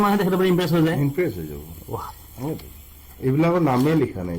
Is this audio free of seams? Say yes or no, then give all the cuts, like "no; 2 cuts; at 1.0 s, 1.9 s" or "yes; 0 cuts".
yes; 0 cuts